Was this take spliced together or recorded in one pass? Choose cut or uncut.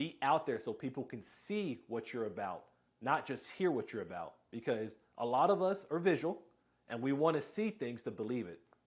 uncut